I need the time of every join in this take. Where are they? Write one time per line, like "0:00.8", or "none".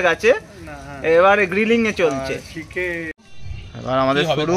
0:03.1